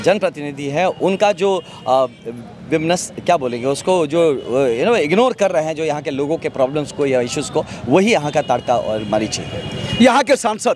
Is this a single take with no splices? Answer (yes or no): yes